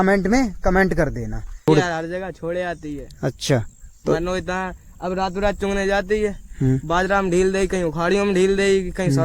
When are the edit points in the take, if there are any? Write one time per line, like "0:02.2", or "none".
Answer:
0:01.6